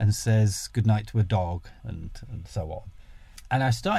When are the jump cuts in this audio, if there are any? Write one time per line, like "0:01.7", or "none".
0:01.7